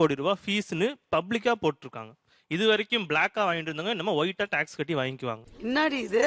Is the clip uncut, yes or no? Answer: yes